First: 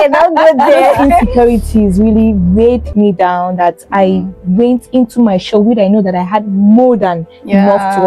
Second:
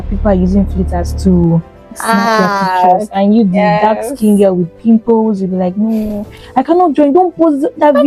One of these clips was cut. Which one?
first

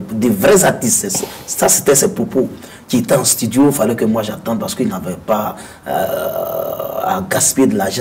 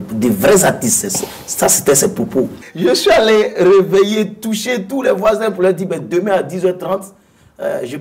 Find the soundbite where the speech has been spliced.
second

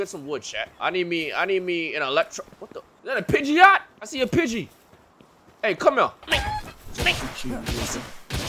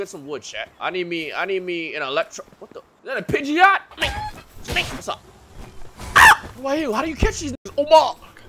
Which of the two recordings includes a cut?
second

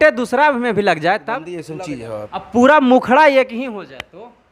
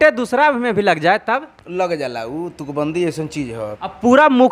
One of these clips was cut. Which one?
first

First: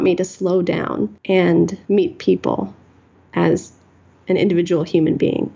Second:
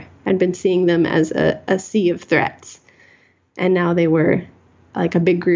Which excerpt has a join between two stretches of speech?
first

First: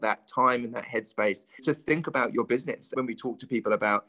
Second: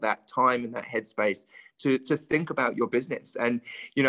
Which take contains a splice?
first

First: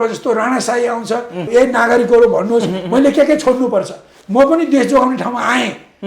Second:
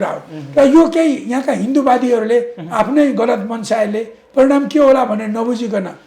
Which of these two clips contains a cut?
first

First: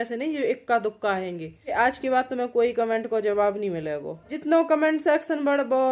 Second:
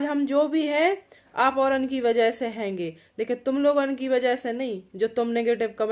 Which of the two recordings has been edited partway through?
first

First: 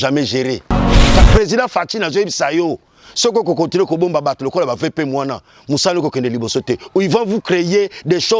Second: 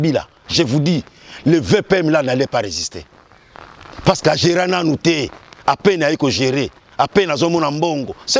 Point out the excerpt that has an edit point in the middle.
first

